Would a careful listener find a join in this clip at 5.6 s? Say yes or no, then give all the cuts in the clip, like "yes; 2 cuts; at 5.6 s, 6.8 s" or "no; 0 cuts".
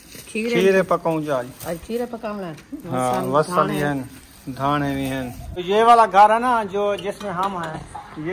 yes; 1 cut; at 5.6 s